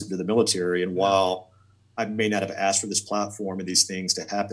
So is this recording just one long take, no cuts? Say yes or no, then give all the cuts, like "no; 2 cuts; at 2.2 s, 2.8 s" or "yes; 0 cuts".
yes; 0 cuts